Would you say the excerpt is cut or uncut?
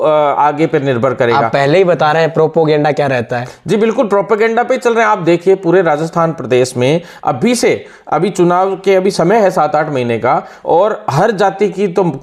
uncut